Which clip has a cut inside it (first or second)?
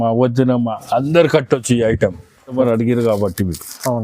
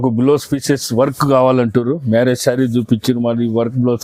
first